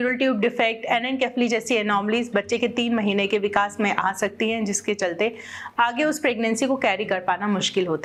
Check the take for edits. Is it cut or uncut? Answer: uncut